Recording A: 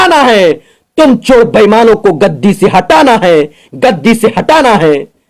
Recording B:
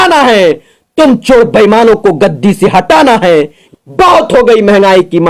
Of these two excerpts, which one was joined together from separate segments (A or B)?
B